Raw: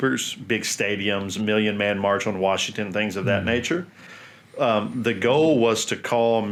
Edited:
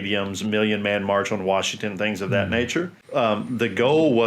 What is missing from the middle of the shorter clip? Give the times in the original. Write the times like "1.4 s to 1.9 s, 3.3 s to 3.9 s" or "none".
3.9 s to 4.4 s